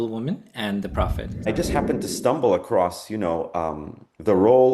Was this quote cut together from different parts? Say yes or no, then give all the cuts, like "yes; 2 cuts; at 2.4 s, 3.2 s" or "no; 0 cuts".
yes; 1 cut; at 1.5 s